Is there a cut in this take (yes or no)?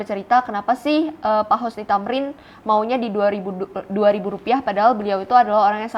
no